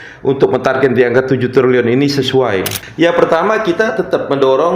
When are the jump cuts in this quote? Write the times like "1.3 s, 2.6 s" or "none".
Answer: 2.8 s